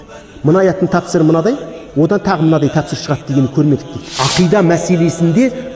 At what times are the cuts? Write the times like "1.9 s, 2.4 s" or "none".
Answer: 4.0 s